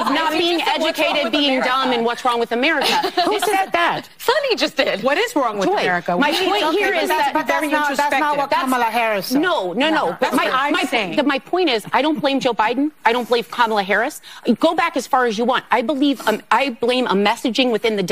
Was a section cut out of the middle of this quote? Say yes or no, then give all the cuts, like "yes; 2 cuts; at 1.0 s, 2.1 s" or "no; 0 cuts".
no; 0 cuts